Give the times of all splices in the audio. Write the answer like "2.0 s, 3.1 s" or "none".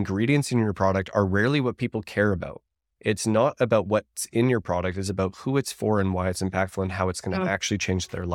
none